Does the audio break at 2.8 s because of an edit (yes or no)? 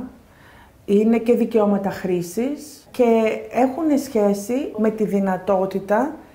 yes